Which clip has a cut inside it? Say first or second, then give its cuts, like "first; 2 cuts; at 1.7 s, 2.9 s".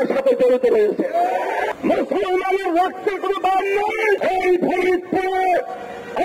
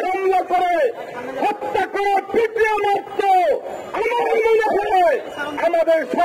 first; 2 cuts; at 1.7 s, 4.2 s